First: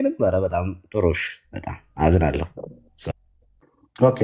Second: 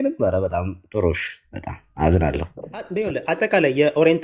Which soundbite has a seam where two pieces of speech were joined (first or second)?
second